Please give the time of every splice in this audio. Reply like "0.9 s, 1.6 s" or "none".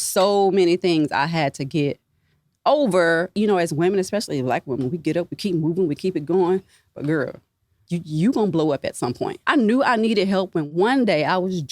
3.3 s, 7.8 s, 9.3 s, 10.7 s